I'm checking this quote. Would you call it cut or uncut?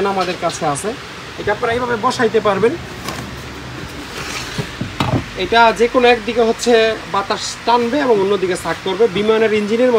uncut